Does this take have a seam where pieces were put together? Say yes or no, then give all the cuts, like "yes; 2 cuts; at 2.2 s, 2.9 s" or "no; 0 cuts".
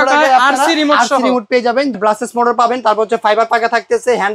yes; 1 cut; at 1.9 s